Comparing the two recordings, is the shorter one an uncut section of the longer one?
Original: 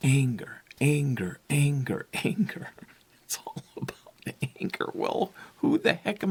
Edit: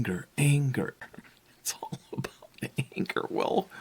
no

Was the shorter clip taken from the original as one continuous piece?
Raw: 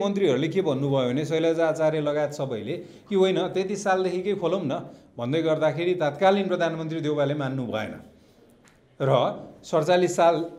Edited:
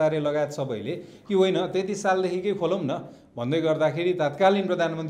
yes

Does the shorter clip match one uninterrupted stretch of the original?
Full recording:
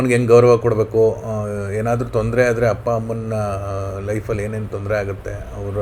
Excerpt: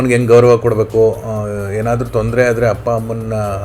yes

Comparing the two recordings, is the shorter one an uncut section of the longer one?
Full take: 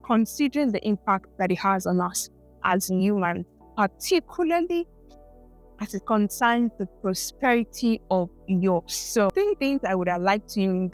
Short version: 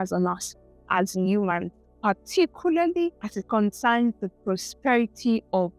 no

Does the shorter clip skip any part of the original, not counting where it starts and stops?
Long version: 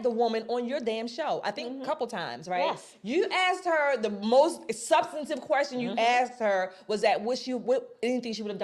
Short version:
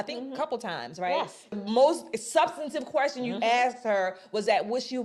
yes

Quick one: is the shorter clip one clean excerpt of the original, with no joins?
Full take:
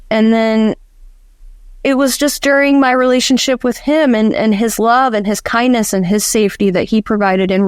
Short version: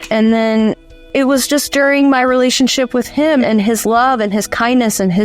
no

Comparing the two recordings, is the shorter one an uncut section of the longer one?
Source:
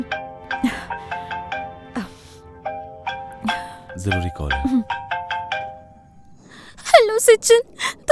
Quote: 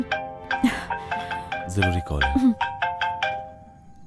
no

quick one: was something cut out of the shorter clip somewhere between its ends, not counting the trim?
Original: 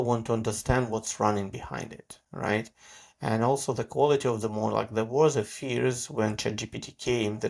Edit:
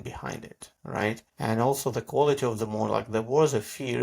yes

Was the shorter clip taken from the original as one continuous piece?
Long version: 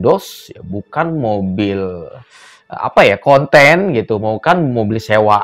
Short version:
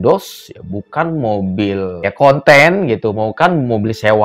no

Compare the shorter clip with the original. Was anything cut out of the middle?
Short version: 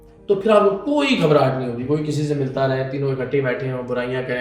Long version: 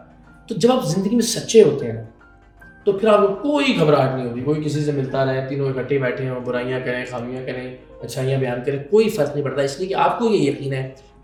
no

